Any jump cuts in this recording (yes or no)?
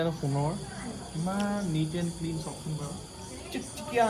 no